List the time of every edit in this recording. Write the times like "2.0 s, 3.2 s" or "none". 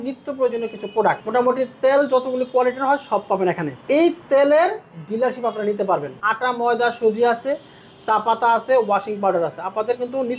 1.2 s, 3.7 s, 6.2 s